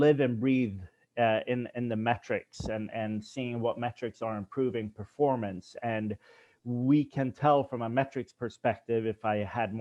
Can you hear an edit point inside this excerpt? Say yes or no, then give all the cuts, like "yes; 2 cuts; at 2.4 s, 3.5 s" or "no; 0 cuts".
no; 0 cuts